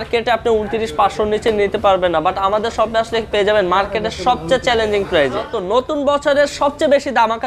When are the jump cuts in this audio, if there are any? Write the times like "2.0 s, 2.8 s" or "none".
5.5 s